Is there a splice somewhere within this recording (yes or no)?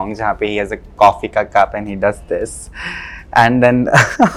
no